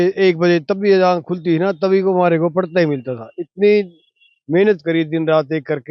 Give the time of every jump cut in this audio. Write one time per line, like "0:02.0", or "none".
none